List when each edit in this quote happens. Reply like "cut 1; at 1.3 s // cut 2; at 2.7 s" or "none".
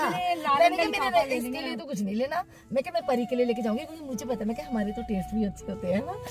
none